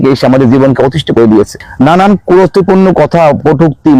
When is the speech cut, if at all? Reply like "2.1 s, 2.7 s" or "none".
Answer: 1.6 s